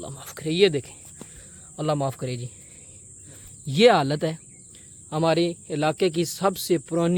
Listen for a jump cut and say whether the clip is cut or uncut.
uncut